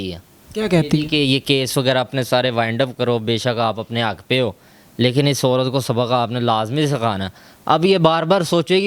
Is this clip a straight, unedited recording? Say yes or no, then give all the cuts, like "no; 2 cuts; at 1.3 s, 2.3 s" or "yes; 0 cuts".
yes; 0 cuts